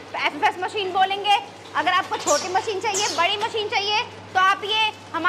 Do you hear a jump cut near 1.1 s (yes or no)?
no